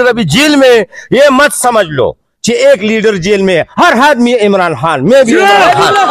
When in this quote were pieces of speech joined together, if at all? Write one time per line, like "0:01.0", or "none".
none